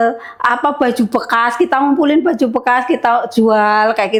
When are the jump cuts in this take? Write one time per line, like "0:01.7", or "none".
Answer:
none